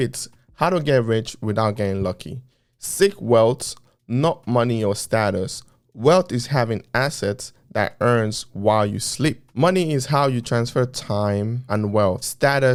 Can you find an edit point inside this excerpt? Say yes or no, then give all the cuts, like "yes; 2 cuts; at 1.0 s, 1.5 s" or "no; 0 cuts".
no; 0 cuts